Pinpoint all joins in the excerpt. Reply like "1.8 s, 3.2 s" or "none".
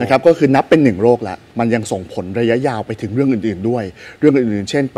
1.4 s